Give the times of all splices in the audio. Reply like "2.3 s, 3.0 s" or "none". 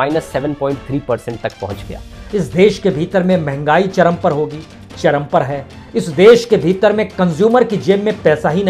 2.1 s